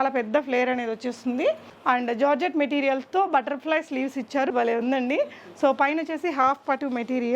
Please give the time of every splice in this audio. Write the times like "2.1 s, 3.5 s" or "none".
1.7 s, 4.5 s